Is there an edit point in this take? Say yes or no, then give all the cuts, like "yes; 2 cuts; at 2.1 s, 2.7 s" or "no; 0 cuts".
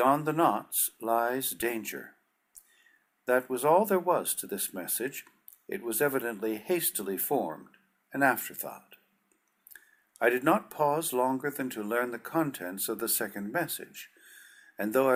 no; 0 cuts